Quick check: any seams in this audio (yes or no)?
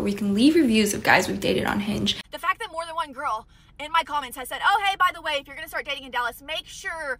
yes